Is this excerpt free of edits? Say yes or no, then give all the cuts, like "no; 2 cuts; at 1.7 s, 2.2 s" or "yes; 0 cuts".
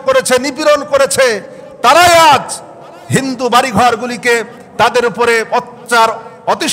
yes; 0 cuts